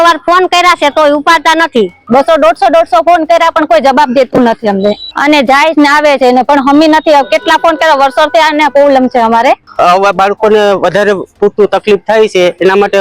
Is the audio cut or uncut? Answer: cut